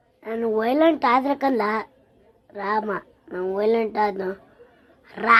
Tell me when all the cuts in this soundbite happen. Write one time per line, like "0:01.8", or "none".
none